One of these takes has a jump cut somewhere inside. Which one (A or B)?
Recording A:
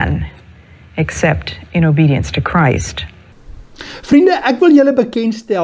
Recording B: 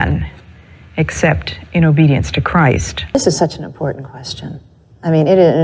B